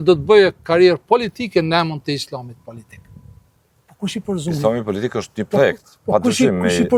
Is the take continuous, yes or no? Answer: yes